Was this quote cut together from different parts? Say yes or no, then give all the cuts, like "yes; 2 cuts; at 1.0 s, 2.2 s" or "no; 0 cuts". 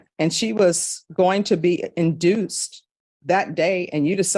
no; 0 cuts